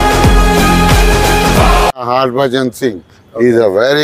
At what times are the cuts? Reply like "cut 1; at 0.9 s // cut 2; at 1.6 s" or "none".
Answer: cut 1; at 1.9 s